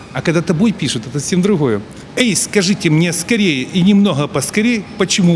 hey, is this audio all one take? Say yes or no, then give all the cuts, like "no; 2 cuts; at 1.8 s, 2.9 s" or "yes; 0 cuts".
no; 1 cut; at 2.0 s